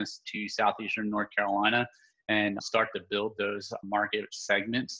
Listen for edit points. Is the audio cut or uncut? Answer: cut